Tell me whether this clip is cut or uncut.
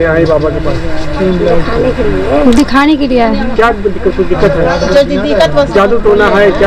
uncut